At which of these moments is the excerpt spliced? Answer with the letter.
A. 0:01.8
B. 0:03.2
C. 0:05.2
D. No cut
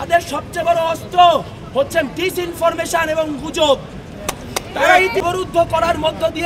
C